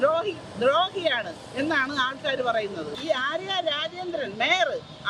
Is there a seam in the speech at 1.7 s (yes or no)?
no